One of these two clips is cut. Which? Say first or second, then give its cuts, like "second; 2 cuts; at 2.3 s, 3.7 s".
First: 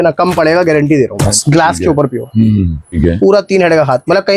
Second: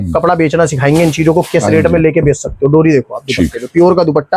first; 2 cuts; at 1.3 s, 3.0 s